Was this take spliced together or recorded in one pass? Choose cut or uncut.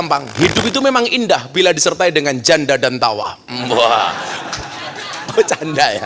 uncut